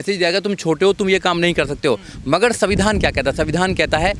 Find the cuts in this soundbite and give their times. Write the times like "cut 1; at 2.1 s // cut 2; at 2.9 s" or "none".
none